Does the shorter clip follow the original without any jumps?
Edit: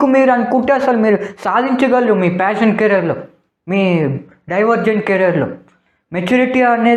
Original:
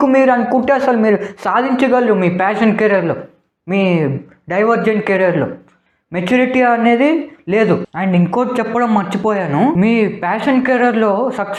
yes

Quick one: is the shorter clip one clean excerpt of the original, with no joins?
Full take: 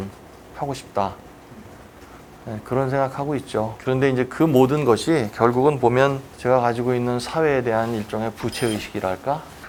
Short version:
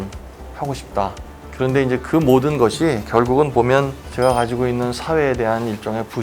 no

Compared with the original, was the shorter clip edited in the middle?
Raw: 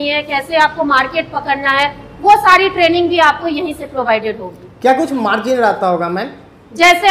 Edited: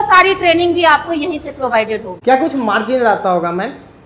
yes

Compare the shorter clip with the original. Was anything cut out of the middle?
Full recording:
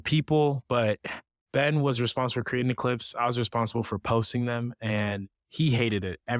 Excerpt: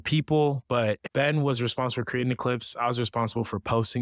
yes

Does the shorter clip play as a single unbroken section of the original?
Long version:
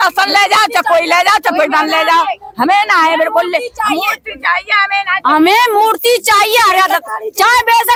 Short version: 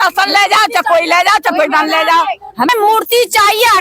no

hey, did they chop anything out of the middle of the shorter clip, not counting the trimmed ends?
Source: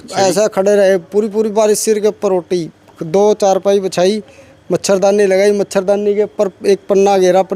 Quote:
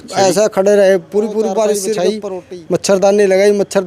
yes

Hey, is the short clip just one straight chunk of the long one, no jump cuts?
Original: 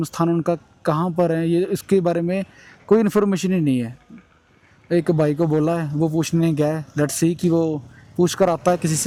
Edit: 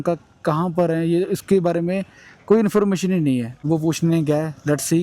no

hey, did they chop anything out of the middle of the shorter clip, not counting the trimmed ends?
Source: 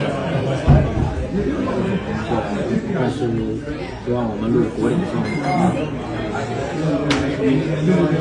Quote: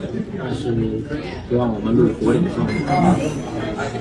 no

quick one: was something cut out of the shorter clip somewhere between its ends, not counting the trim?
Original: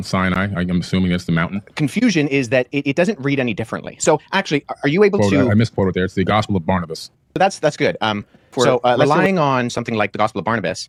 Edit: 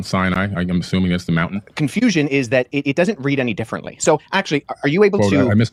no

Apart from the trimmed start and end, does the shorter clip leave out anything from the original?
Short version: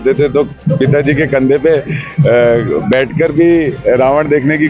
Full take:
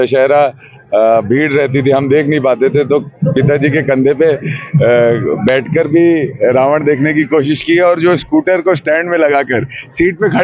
no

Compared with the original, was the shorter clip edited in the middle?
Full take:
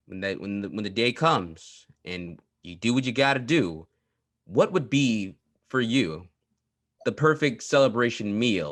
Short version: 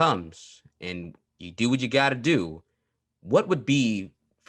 no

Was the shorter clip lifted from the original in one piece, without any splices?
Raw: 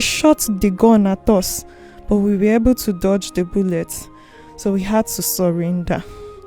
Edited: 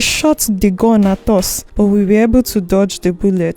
no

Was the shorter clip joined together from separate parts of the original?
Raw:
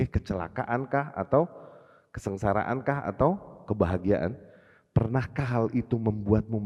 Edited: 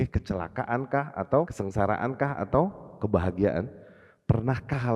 yes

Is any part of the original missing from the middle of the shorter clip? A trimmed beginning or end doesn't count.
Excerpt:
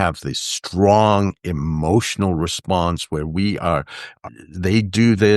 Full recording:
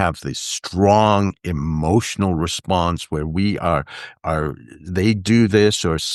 yes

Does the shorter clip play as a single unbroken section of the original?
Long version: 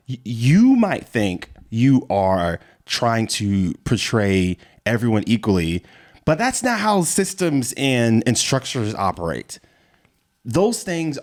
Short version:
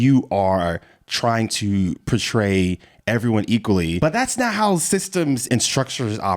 no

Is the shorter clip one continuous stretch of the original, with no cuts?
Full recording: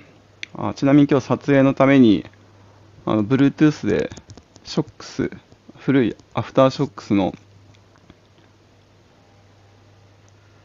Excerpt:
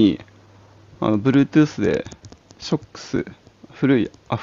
yes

